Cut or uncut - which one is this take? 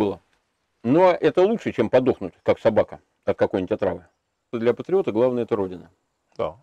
cut